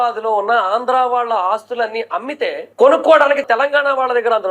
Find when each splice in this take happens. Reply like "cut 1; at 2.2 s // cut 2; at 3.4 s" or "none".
cut 1; at 3.4 s